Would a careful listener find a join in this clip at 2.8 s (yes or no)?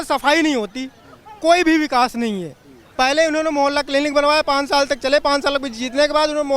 no